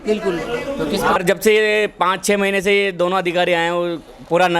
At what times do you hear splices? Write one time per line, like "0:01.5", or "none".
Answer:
0:01.2